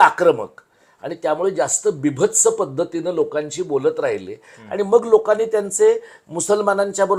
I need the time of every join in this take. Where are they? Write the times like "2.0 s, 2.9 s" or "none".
none